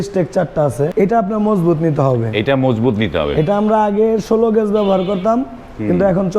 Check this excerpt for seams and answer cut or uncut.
cut